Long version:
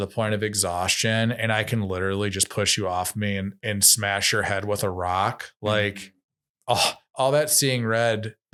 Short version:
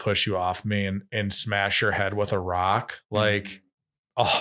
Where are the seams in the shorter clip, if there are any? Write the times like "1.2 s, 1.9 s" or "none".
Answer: none